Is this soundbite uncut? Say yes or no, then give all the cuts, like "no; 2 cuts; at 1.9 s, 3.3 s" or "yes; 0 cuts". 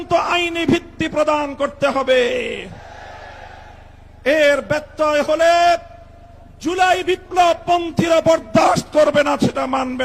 yes; 0 cuts